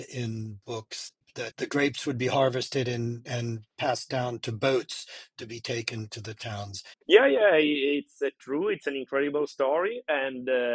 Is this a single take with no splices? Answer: no; 2 cuts; at 1.2 s, 6.9 s

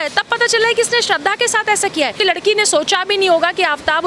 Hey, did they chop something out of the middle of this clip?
yes; 1 cut; at 2.2 s

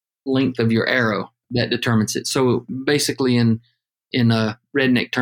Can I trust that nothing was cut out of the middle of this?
no; 1 cut; at 1.4 s

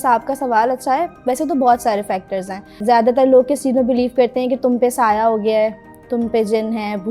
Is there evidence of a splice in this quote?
yes; 1 cut; at 2.8 s

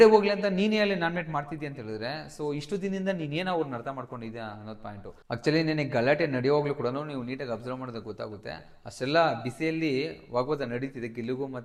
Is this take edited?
no; 0 cuts

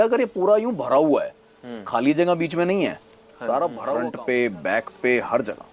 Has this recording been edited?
yes; 1 cut; at 4.1 s

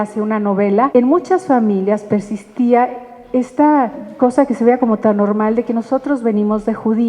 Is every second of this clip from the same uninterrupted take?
no; 2 cuts; at 0.9 s, 4.0 s

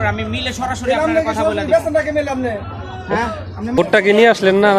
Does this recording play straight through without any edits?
no; 1 cut; at 3.8 s

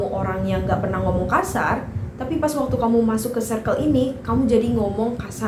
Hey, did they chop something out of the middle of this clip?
no; 0 cuts

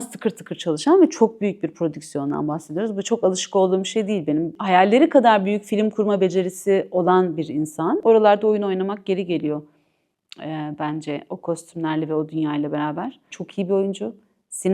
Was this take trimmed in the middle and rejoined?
yes; 3 cuts; at 4.6 s, 8.0 s, 13.3 s

